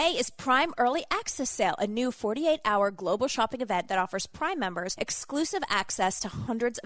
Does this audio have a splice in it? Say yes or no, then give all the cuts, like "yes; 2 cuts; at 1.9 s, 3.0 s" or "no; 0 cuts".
yes; 1 cut; at 4.9 s